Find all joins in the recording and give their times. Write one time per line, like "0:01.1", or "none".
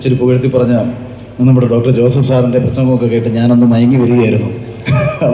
none